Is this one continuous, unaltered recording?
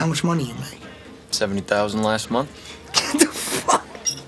yes; 0 cuts

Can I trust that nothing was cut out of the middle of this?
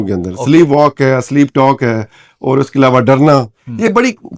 yes; 0 cuts

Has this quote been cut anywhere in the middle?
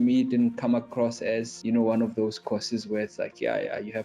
yes; 1 cut; at 1.5 s

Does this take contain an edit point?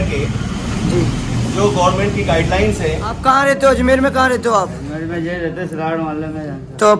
yes; 1 cut; at 3.2 s

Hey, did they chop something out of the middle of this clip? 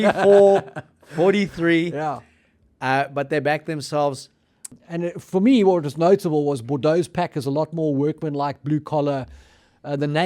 yes; 1 cut; at 4.8 s

